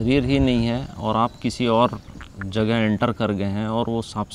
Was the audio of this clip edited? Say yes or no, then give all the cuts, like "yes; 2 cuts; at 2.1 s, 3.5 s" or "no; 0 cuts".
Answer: no; 0 cuts